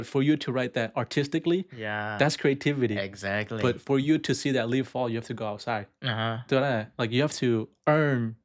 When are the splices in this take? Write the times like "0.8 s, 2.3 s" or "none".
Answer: none